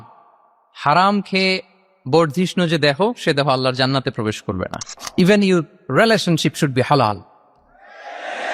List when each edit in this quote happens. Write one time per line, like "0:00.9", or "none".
0:04.9